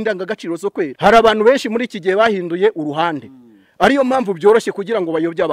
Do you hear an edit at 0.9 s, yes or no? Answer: yes